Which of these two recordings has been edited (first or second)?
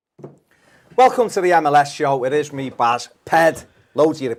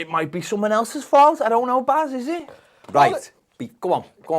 second